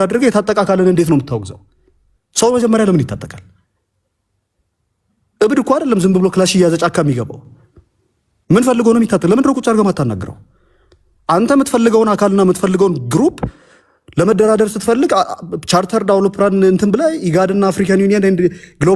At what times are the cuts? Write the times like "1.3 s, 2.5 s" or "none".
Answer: none